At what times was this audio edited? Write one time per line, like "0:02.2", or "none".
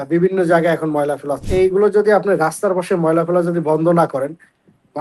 0:01.4